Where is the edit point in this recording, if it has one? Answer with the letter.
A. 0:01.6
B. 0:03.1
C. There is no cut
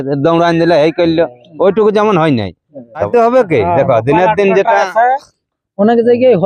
B